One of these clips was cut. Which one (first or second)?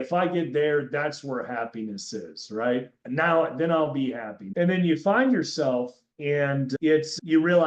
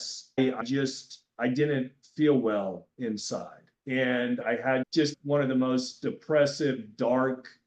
first